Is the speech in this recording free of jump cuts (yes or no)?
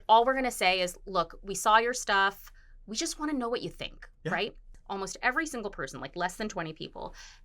no